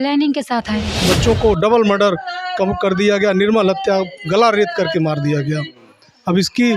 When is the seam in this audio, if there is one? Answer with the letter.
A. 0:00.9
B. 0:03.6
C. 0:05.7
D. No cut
A